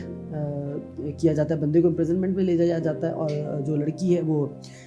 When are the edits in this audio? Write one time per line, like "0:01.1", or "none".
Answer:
none